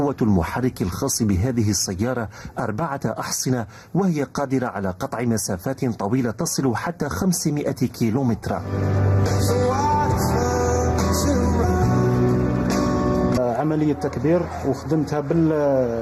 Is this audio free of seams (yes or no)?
yes